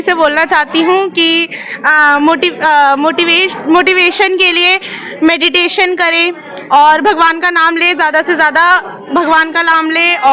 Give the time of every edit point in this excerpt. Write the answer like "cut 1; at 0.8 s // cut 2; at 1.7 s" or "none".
none